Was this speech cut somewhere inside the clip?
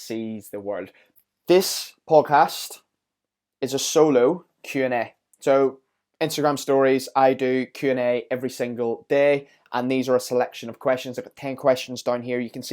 yes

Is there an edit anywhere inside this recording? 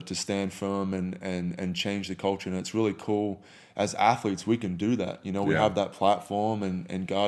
no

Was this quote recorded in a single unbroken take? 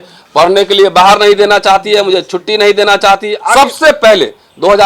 no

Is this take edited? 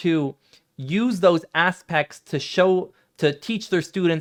no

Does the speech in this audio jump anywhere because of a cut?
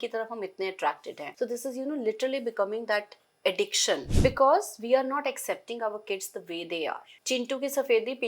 yes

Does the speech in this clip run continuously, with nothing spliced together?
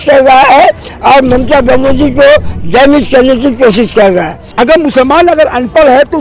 no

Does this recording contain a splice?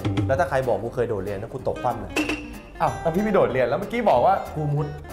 no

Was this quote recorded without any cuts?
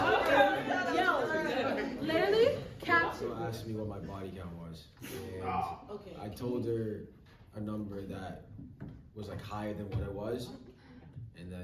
no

